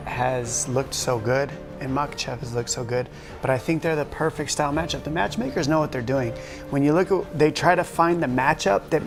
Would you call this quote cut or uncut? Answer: uncut